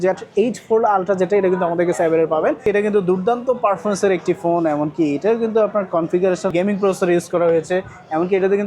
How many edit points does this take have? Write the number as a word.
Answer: two